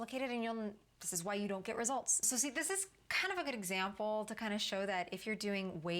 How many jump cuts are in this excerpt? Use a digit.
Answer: 1